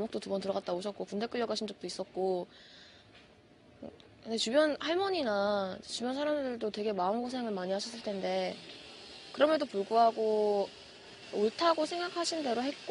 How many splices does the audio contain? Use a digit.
1